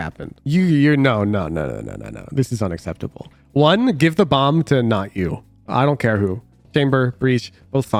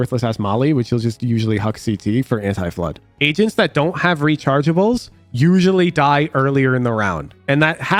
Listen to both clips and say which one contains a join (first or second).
second